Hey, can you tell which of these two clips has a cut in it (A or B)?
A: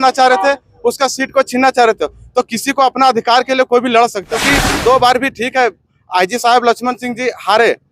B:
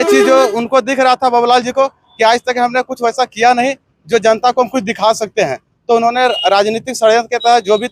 A